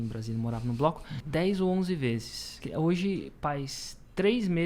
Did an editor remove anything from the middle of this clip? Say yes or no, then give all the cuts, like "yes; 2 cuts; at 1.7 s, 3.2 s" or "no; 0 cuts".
yes; 2 cuts; at 1.1 s, 2.6 s